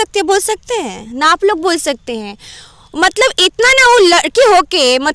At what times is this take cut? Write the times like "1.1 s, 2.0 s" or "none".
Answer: none